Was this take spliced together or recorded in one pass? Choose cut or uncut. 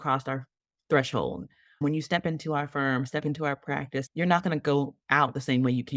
cut